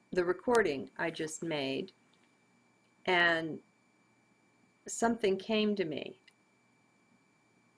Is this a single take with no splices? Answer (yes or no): yes